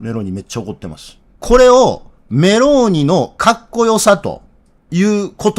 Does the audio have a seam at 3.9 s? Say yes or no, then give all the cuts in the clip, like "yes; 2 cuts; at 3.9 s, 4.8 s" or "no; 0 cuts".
no; 1 cut; at 1.3 s